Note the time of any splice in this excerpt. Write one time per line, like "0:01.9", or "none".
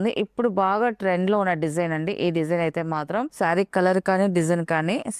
0:03.3